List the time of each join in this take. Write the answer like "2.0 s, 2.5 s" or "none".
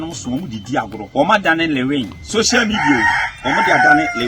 1.0 s, 2.2 s